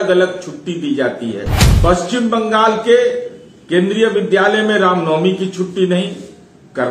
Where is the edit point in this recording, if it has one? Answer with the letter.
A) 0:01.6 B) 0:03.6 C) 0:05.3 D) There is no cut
A